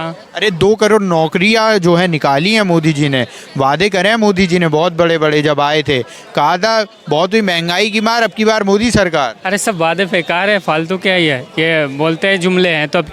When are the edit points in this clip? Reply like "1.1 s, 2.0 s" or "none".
none